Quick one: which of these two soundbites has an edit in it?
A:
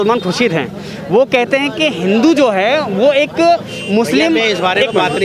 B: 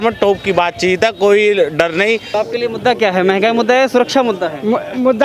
B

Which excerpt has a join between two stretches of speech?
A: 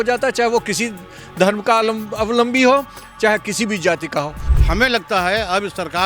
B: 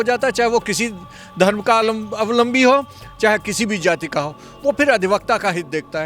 A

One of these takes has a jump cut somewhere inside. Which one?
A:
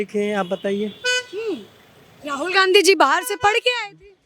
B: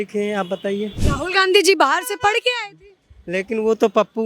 B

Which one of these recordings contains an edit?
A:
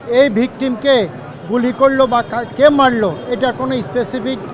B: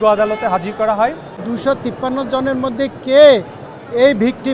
B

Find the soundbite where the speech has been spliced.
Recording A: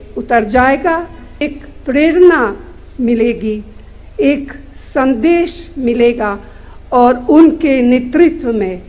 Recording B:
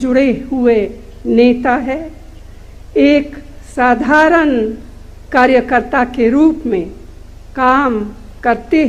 A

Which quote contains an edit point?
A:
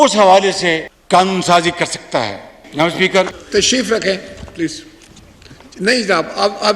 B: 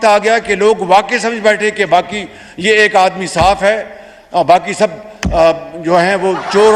A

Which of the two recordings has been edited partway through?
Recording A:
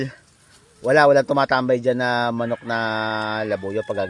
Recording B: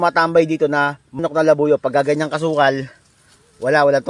B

